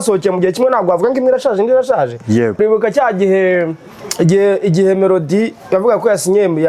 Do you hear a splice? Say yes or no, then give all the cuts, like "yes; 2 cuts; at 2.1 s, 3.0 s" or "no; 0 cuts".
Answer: yes; 1 cut; at 2.6 s